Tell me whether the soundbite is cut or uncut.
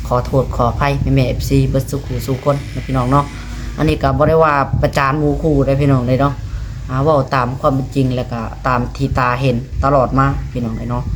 uncut